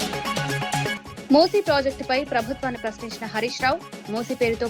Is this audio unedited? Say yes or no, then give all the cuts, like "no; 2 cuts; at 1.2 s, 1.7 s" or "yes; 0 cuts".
no; 1 cut; at 1.1 s